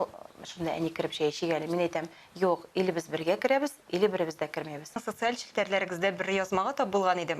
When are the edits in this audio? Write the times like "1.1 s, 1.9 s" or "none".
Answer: 5.1 s